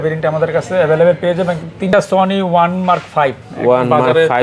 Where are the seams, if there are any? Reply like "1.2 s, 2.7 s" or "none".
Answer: 1.9 s

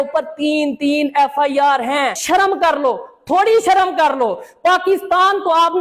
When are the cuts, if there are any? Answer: 2.2 s

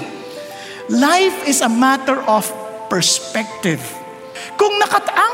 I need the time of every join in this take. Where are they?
4.4 s

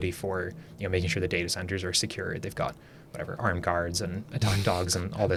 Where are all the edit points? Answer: none

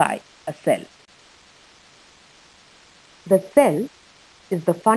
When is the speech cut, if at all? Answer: 1.1 s

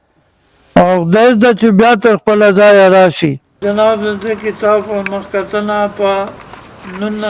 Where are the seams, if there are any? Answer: 3.5 s

